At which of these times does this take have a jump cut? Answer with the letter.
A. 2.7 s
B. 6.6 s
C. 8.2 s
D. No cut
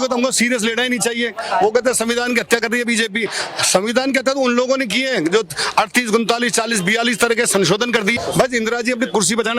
C